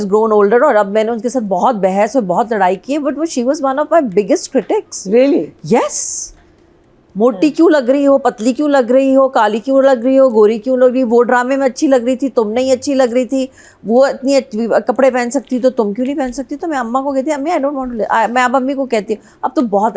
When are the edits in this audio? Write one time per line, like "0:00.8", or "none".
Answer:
none